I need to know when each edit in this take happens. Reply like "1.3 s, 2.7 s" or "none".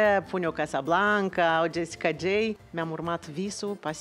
2.7 s